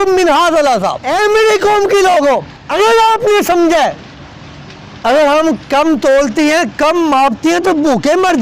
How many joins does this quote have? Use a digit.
2